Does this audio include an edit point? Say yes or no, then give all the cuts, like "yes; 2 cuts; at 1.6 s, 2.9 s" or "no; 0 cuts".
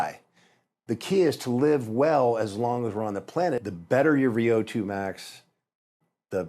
yes; 1 cut; at 3.6 s